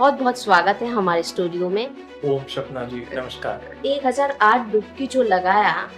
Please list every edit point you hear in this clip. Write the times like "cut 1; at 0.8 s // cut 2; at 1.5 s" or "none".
cut 1; at 2.0 s // cut 2; at 3.8 s